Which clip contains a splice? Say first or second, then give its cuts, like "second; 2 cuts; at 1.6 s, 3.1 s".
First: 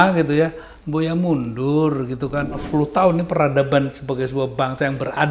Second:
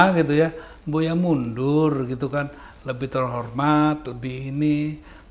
first; 1 cut; at 2.6 s